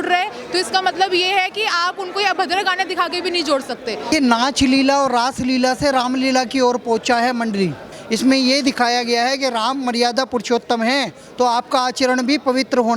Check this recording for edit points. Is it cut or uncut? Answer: cut